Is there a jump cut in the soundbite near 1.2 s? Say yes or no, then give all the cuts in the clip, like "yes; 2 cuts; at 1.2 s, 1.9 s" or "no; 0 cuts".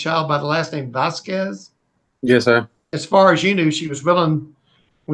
no; 1 cut; at 2.9 s